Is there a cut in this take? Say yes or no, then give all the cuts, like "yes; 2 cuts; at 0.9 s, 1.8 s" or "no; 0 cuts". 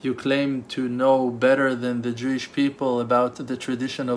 no; 0 cuts